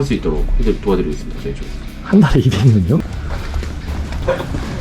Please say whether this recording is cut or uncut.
cut